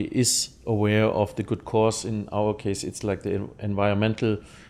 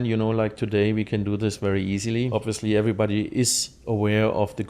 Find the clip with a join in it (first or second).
second